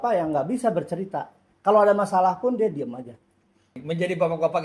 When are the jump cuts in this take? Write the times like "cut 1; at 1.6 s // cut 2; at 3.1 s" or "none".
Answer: cut 1; at 3.7 s